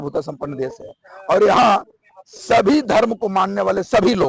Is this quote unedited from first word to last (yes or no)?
yes